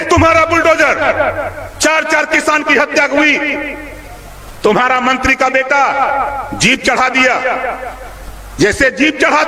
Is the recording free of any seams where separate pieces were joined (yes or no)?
yes